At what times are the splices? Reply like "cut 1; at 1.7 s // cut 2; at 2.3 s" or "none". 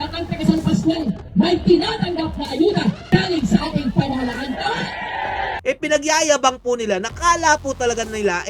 cut 1; at 5.6 s